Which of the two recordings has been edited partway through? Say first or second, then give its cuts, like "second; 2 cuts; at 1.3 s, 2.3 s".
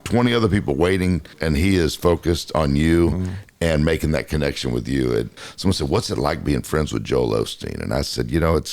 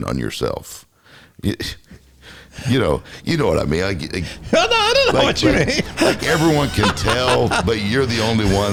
first; 2 cuts; at 1.4 s, 5.3 s